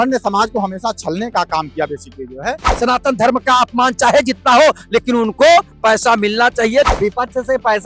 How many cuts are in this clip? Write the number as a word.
two